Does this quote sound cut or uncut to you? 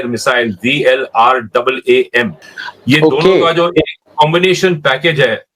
uncut